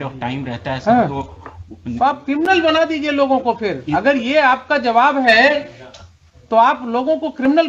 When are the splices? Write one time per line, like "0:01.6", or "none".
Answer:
none